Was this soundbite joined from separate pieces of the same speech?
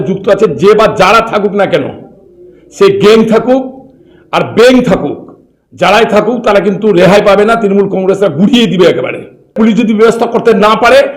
yes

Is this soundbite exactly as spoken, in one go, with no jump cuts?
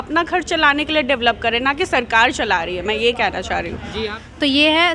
no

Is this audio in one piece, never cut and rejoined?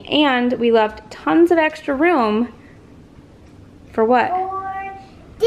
yes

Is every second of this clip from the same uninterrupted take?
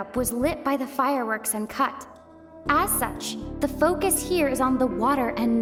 yes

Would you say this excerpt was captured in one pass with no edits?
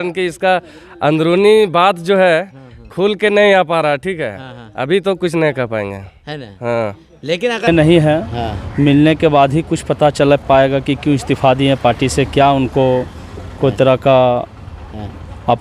no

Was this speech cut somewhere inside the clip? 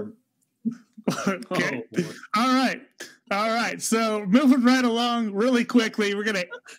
no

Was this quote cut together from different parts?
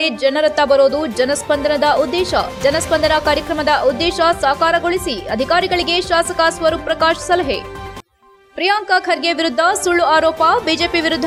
no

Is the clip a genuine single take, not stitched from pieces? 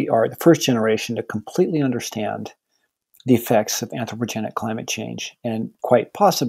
yes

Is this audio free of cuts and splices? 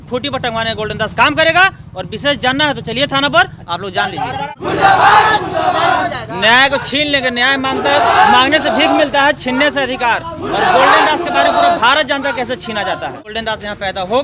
no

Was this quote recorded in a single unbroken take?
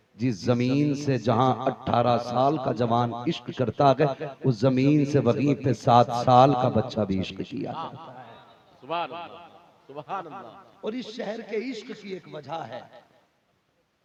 yes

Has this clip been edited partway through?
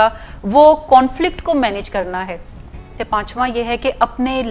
yes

